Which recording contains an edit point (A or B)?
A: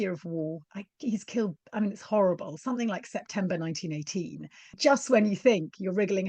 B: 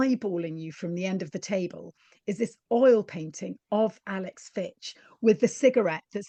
A